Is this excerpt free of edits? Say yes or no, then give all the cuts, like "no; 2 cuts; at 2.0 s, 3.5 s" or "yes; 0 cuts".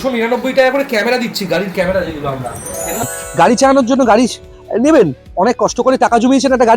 no; 1 cut; at 3.1 s